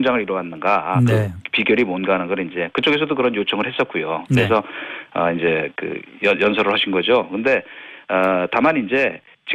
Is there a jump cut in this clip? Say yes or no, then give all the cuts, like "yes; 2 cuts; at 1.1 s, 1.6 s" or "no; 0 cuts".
no; 0 cuts